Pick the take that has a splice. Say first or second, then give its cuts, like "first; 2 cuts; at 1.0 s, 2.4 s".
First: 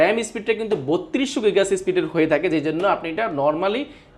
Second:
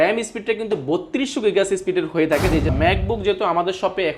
second; 1 cut; at 2.7 s